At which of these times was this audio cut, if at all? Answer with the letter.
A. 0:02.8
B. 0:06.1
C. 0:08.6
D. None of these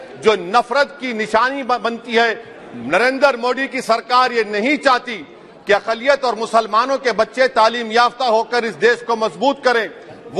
B